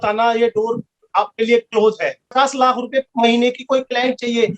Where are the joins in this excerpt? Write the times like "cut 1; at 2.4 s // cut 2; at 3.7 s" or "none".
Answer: cut 1; at 2.2 s